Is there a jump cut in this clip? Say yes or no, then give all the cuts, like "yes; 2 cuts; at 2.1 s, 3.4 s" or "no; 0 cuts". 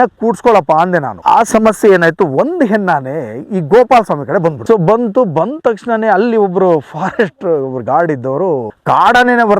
yes; 2 cuts; at 1.1 s, 4.6 s